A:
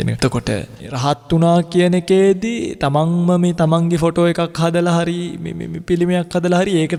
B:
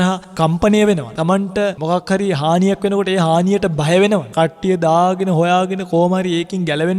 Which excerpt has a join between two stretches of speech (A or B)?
B